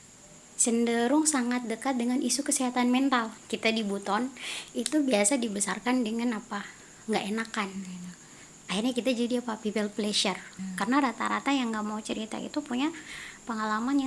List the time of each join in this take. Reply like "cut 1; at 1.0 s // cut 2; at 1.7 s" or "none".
cut 1; at 3.4 s // cut 2; at 10.7 s